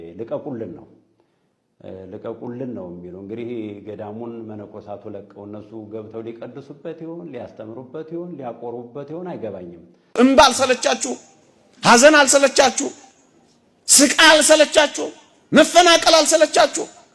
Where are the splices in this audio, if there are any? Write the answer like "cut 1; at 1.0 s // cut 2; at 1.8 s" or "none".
cut 1; at 10.2 s